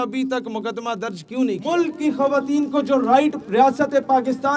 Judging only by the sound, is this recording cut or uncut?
cut